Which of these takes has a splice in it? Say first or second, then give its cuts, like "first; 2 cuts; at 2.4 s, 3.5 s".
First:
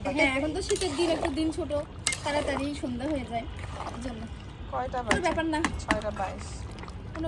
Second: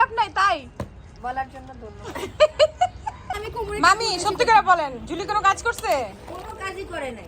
second; 1 cut; at 3.4 s